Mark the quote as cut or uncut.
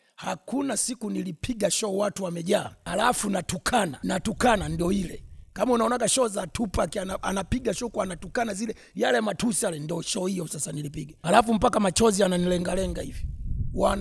cut